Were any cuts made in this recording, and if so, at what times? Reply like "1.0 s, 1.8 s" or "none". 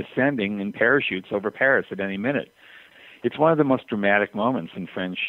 2.8 s